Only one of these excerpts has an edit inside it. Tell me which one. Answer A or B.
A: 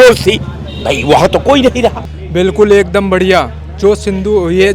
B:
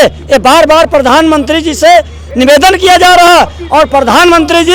A